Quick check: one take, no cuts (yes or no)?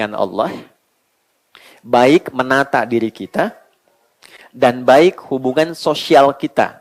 yes